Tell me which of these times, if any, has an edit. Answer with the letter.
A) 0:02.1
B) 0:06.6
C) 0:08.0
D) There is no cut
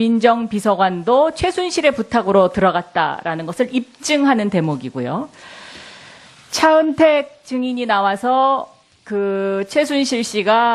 A